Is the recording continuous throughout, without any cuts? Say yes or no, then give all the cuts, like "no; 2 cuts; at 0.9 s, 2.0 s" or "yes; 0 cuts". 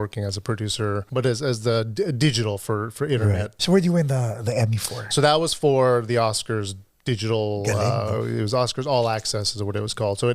no; 2 cuts; at 1.0 s, 3.6 s